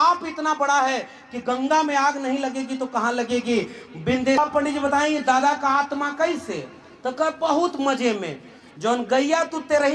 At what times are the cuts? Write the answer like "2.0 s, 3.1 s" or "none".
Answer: 4.4 s